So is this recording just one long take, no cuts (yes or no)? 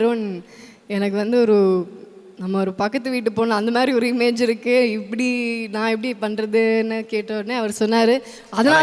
yes